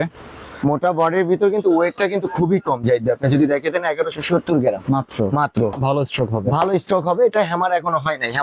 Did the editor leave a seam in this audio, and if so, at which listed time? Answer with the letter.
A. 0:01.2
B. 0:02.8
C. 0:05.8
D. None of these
C